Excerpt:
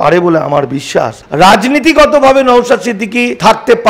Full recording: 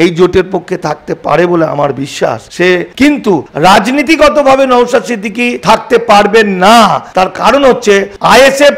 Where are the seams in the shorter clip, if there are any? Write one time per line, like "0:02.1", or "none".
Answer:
0:01.2